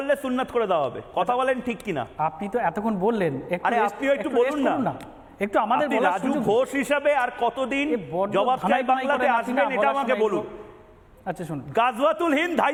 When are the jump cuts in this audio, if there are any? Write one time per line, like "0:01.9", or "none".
none